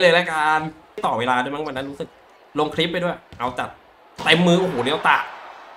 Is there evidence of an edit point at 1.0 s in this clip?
yes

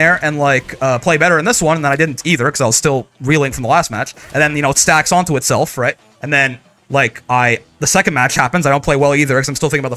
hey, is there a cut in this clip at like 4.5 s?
no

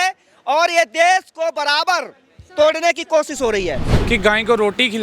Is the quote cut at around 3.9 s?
yes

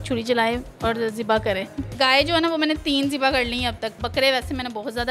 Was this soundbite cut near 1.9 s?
yes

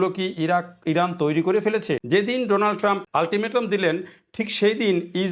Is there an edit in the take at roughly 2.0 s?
yes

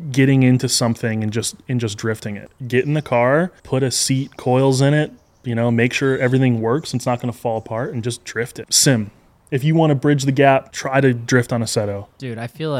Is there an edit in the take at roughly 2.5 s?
yes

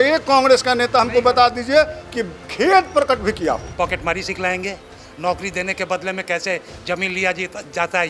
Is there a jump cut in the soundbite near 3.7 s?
yes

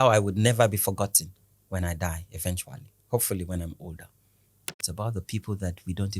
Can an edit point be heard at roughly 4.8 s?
yes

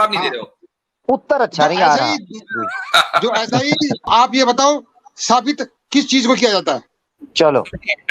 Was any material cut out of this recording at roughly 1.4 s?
no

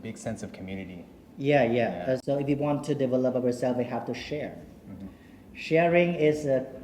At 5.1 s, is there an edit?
no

